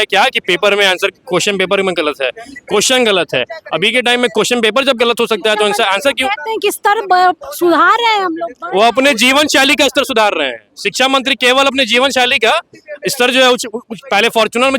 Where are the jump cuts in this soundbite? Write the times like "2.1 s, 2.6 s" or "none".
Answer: none